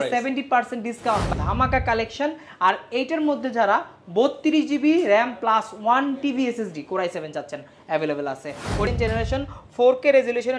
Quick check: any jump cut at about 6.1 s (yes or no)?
no